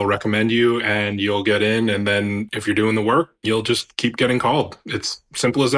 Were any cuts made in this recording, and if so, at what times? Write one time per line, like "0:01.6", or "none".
0:02.5
0:03.3